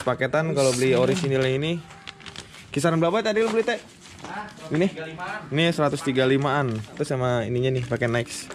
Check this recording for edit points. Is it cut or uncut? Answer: uncut